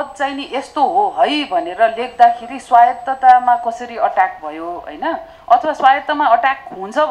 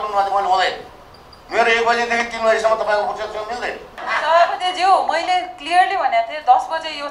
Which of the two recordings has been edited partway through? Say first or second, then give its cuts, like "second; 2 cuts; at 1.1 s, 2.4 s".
second; 1 cut; at 4.0 s